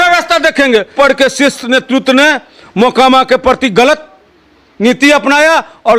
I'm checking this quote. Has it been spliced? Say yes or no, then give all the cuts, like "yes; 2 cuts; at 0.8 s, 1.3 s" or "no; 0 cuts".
yes; 1 cut; at 0.9 s